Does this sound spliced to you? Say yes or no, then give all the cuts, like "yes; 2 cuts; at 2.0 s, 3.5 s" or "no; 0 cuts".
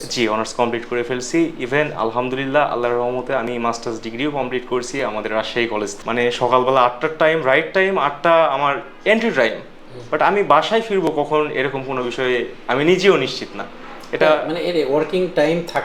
yes; 1 cut; at 6.0 s